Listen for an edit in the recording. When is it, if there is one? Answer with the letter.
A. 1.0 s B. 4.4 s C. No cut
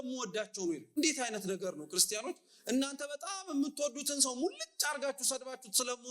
A